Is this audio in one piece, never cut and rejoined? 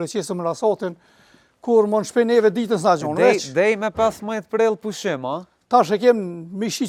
yes; 0 cuts

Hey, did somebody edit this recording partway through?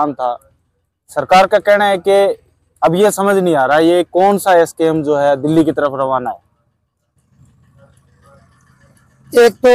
no; 0 cuts

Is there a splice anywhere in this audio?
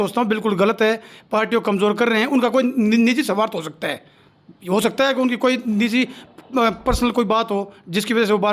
no; 0 cuts

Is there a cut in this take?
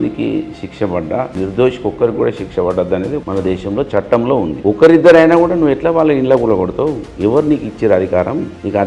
yes; 3 cuts; at 1.3 s, 3.2 s, 4.6 s

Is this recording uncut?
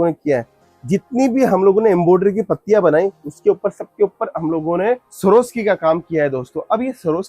yes; 0 cuts

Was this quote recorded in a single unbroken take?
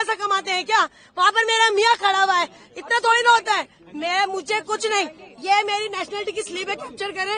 yes; 0 cuts

